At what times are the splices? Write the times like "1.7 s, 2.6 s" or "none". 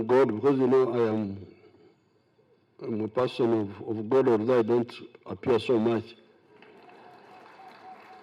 none